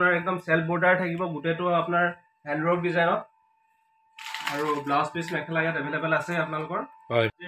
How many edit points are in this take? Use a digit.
0